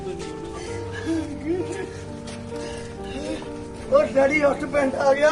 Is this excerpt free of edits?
no; 1 cut; at 3.8 s

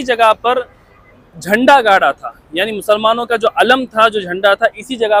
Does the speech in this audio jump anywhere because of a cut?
no; 0 cuts

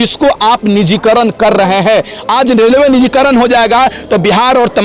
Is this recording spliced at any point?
no; 0 cuts

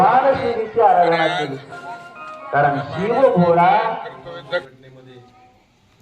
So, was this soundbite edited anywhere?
yes; 1 cut; at 4.6 s

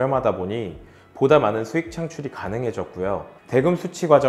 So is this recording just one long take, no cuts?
no; 1 cut; at 3.3 s

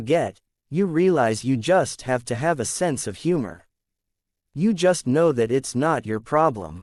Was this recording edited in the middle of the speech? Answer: no; 0 cuts

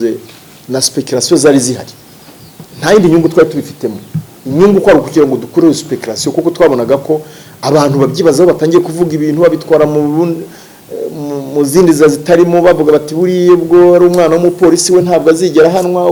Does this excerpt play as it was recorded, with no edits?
yes; 0 cuts

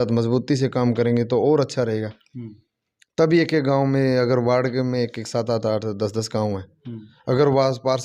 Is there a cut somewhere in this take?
no; 0 cuts

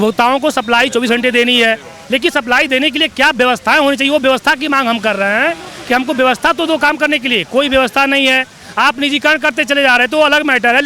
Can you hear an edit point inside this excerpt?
no; 0 cuts

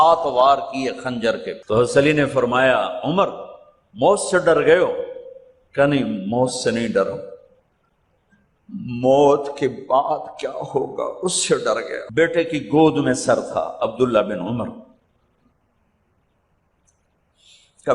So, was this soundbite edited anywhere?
yes; 2 cuts; at 1.5 s, 12.0 s

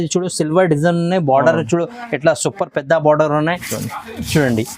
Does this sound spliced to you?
yes; 1 cut; at 3.7 s

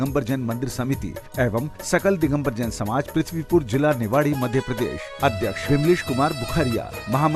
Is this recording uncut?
yes; 0 cuts

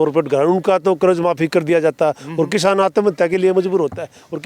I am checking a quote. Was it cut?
no; 0 cuts

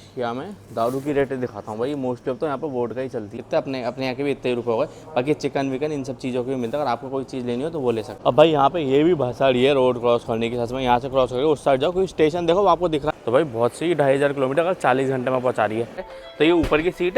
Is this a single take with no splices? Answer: no; 4 cuts; at 3.4 s, 8.1 s, 13.1 s, 16.1 s

